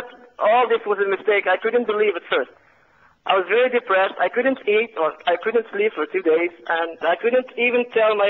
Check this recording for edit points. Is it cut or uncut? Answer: cut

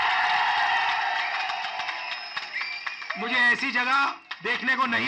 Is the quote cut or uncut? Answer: uncut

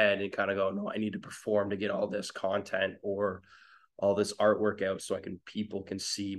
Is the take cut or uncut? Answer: uncut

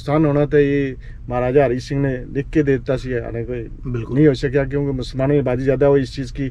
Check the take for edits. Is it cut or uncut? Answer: uncut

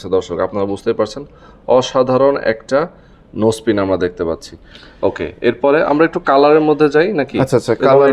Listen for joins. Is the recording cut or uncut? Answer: uncut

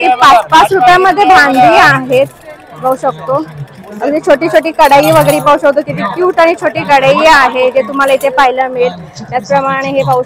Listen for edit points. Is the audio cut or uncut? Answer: uncut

